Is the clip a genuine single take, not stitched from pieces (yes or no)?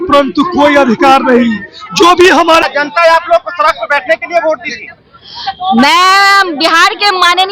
no